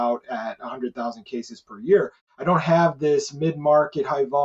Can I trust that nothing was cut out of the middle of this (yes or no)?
no